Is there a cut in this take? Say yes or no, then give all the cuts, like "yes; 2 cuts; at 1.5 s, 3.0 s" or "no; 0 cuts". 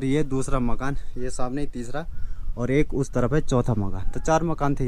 no; 0 cuts